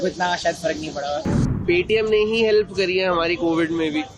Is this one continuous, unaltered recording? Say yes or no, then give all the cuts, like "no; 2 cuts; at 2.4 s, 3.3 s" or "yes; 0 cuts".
no; 1 cut; at 1.5 s